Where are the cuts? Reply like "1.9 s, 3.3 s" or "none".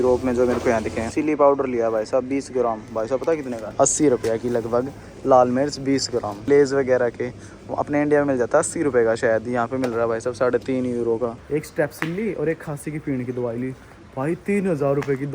1.1 s, 3.7 s, 6.4 s, 11.4 s

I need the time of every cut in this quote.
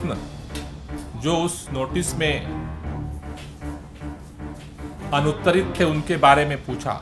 2.4 s, 5.1 s

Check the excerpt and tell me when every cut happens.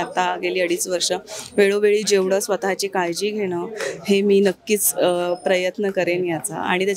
none

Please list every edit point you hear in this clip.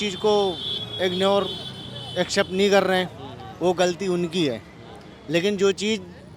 none

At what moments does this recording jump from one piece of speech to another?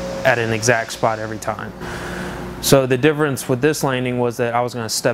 none

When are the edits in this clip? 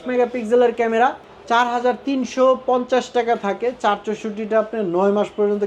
1.3 s

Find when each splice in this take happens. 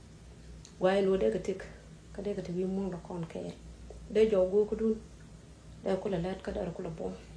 3.2 s

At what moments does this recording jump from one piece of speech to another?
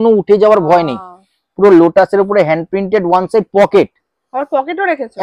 none

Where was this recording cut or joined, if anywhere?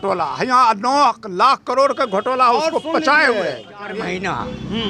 3.9 s

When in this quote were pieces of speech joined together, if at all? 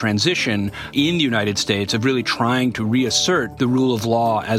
0.9 s, 3.5 s

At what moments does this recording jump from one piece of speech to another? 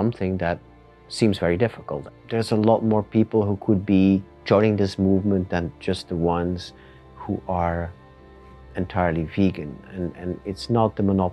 1.9 s

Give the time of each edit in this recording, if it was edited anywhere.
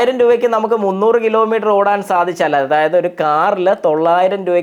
none

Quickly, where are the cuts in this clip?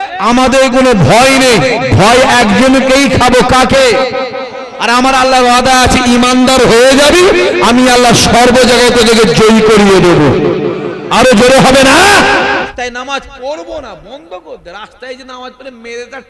12.5 s

